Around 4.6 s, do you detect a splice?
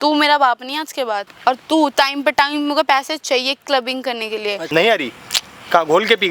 yes; 2 cuts; at 1.3 s, 4.6 s

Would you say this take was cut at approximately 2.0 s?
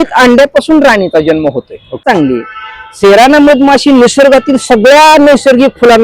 yes; 1 cut; at 2.0 s

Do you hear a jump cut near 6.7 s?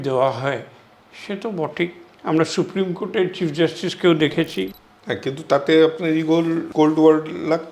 yes; 2 cuts; at 4.7 s, 6.7 s

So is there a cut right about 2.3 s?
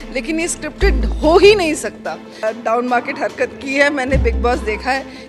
yes; 1 cut; at 2.3 s

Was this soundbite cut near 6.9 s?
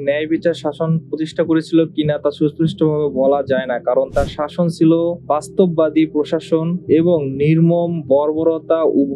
no; 1 cut; at 4.1 s

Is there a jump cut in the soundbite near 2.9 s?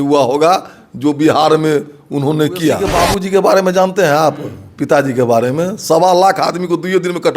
yes; 1 cut; at 2.9 s

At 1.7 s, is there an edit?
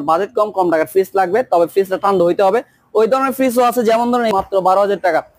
no; 1 cut; at 4.3 s

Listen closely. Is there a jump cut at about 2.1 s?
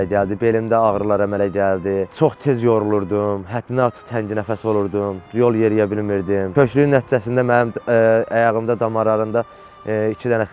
yes; 1 cut; at 2.1 s

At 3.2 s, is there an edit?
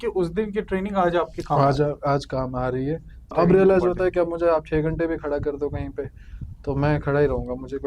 yes; 1 cut; at 3.2 s

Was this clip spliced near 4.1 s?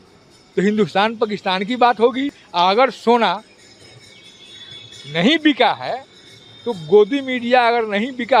no; 1 cut; at 2.4 s

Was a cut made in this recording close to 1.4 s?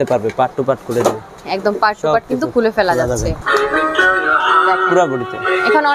yes; 2 cuts; at 1.4 s, 3.4 s

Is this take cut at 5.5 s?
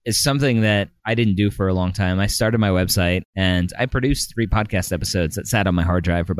no; 2 cuts; at 1.0 s, 3.3 s

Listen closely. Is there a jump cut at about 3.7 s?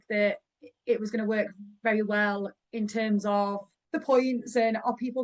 yes; 2 cuts; at 2.6 s, 3.7 s

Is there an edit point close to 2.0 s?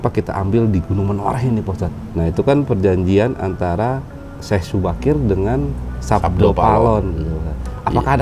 yes; 1 cut; at 2.0 s

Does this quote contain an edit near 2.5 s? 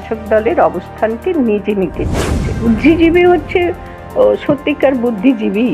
yes; 1 cut; at 2.5 s

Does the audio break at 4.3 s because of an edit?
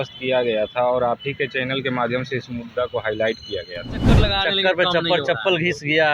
yes; 1 cut; at 4.3 s

